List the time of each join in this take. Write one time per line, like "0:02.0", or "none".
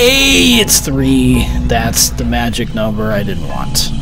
0:01.1